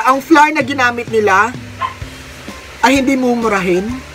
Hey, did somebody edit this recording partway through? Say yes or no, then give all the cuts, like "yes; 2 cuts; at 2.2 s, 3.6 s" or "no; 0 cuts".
no; 0 cuts